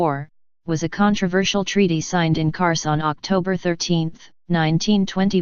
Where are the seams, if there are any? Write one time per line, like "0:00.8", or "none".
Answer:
0:02.2